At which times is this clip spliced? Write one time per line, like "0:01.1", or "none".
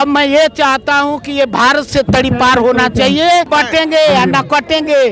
0:03.5